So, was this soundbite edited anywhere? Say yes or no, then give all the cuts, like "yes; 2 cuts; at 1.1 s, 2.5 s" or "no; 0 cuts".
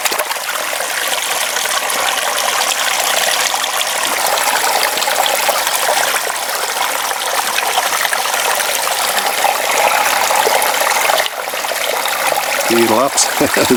no; 0 cuts